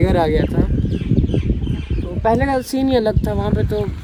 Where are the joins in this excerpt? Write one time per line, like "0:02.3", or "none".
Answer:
none